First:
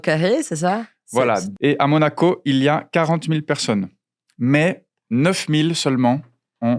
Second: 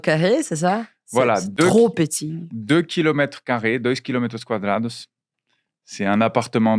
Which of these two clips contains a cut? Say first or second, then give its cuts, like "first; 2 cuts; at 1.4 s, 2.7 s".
first; 1 cut; at 1.5 s